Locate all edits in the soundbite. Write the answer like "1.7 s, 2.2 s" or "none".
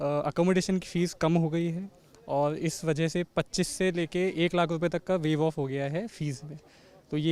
none